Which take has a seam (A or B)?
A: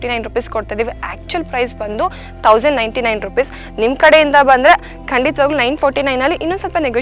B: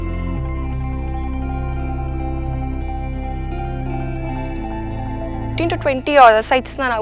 B